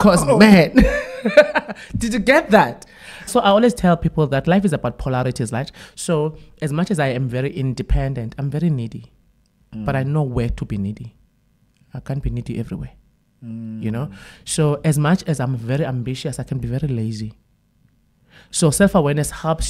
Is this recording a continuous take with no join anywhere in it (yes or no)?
no